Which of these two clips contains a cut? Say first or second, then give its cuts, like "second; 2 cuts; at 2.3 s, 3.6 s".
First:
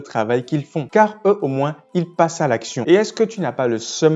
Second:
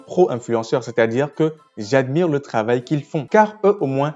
first; 1 cut; at 2.8 s